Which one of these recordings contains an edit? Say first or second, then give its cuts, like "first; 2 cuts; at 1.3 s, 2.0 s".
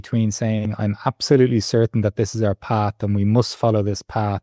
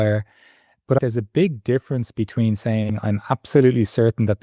second; 1 cut; at 1.0 s